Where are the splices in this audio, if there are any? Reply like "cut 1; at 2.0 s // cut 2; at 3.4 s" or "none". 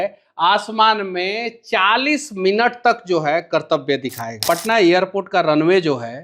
cut 1; at 4.4 s